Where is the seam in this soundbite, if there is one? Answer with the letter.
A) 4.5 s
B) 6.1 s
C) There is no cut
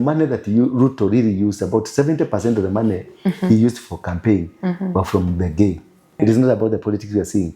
B